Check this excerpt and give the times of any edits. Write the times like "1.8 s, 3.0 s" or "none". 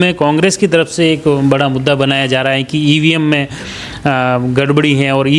none